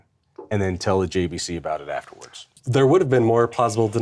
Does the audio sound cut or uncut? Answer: cut